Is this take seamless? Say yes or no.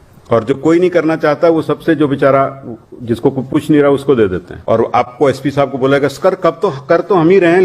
no